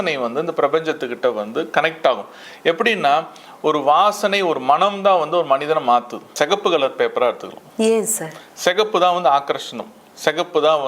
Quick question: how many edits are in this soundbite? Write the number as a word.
one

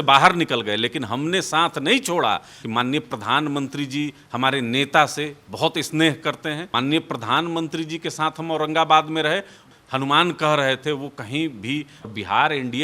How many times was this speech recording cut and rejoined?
four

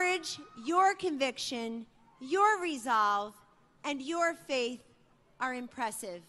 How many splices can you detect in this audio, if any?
one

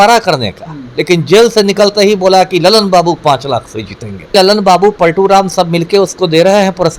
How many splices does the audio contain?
one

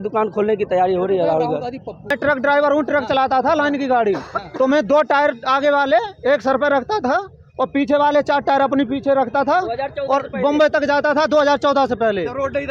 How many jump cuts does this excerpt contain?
one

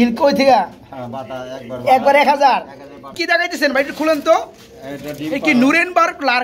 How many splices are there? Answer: one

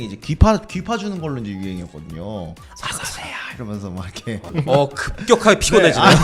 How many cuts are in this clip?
two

